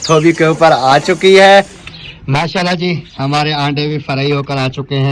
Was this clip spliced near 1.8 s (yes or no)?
yes